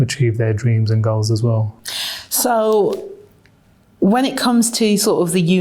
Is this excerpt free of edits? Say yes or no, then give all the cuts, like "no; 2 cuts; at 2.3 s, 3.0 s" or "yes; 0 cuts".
yes; 0 cuts